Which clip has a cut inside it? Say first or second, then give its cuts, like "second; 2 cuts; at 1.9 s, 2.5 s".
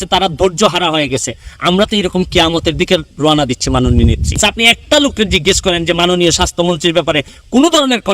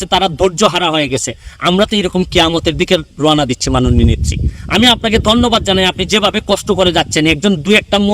first; 1 cut; at 4.4 s